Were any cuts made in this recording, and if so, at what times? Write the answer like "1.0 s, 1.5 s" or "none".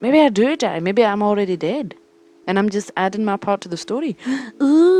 none